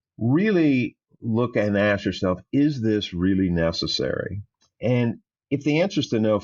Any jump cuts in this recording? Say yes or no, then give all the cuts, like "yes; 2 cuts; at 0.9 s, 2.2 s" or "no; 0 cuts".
no; 0 cuts